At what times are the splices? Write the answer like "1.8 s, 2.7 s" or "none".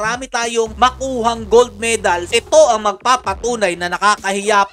2.4 s